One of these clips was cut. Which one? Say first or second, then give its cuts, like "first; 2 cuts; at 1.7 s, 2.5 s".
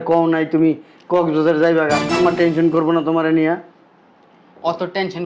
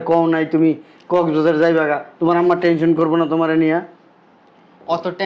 first; 1 cut; at 2.1 s